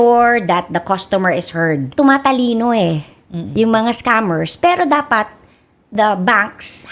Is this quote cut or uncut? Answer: cut